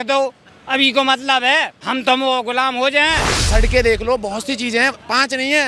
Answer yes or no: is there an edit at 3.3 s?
yes